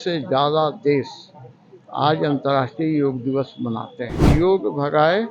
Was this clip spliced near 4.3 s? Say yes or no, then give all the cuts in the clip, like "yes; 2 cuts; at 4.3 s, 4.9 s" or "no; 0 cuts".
yes; 1 cut; at 4.3 s